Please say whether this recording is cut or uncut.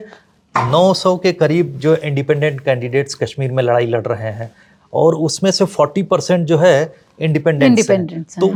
uncut